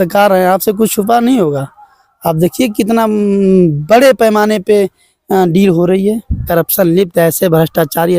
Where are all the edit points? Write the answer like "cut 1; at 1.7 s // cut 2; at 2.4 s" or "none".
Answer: cut 1; at 6.4 s